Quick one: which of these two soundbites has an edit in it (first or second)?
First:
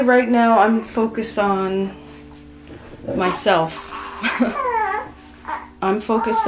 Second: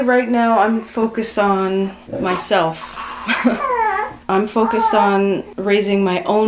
second